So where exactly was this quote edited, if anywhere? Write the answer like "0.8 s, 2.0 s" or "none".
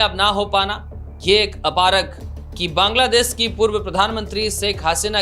2.2 s